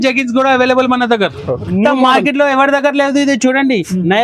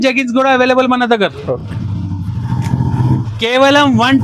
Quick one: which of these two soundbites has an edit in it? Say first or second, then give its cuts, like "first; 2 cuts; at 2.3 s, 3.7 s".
first; 1 cut; at 1.7 s